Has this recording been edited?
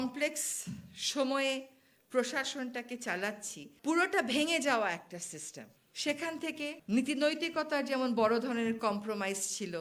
no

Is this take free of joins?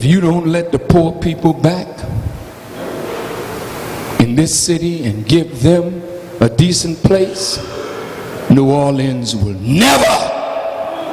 yes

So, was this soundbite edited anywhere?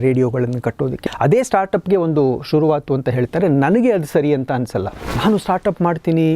yes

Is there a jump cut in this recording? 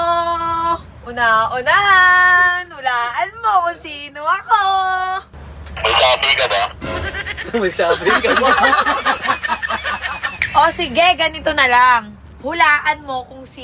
yes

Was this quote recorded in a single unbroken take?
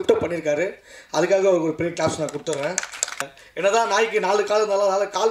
no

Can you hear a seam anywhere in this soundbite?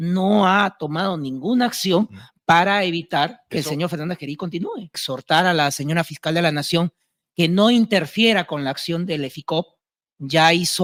no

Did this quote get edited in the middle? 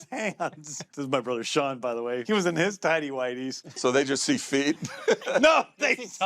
yes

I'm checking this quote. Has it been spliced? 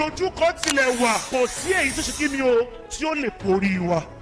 yes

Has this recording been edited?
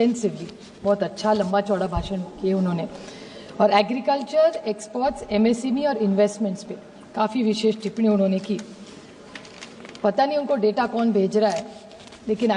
no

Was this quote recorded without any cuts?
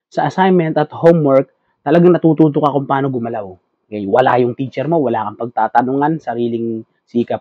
yes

